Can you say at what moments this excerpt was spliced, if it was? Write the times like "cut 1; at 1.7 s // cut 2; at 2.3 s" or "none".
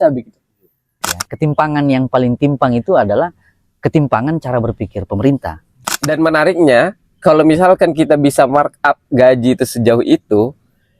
cut 1; at 1.1 s // cut 2; at 5.9 s